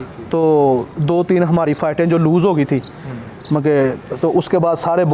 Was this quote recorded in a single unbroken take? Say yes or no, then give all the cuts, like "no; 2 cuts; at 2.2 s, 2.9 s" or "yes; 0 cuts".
yes; 0 cuts